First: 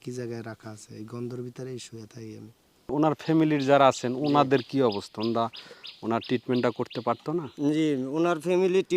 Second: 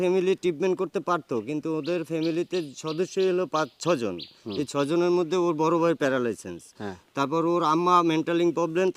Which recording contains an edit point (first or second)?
first